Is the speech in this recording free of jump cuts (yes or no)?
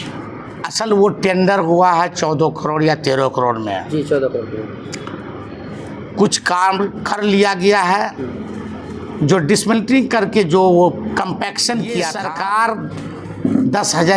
no